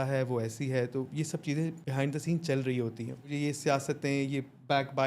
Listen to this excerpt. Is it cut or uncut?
cut